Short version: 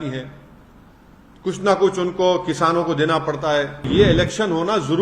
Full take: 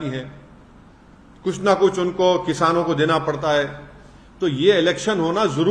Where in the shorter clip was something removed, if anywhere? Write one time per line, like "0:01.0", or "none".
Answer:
0:03.9